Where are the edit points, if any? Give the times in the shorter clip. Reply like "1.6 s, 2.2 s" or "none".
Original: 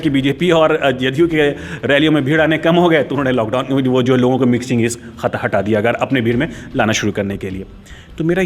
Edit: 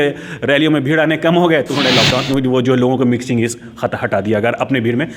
none